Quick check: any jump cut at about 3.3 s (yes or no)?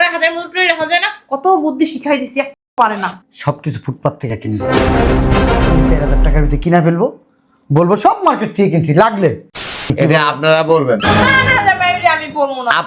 yes